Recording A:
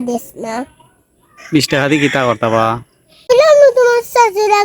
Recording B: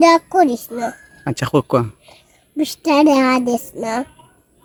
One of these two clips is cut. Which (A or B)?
A